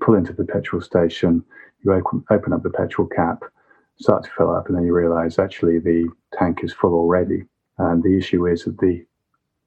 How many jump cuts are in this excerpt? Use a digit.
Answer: 0